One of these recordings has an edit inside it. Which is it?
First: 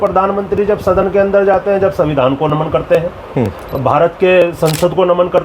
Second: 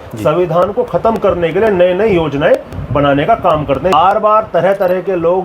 second; 1 cut; at 3.9 s

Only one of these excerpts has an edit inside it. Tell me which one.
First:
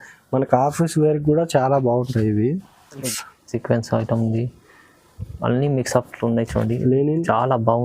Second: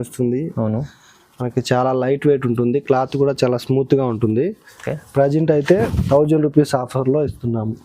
first; 1 cut; at 3.0 s

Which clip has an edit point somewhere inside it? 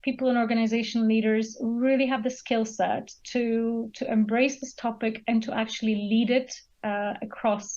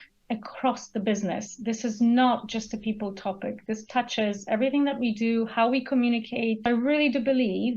second; 1 cut; at 6.6 s

